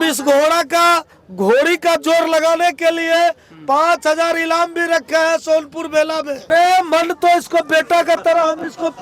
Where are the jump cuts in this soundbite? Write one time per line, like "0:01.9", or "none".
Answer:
0:06.5